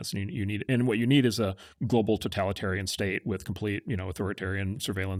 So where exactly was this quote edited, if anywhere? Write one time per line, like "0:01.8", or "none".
none